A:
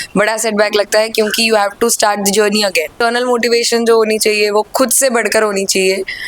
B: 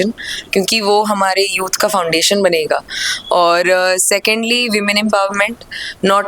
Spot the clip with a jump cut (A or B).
A